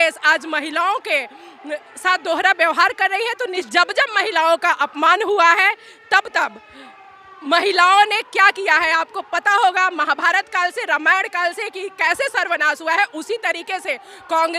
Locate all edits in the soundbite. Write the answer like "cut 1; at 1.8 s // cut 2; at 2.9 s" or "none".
cut 1; at 3.6 s